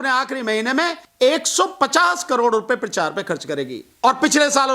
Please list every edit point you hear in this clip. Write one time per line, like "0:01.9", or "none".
0:01.0